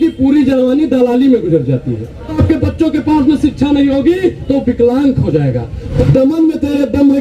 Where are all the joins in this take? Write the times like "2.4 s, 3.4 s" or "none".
2.4 s, 6.0 s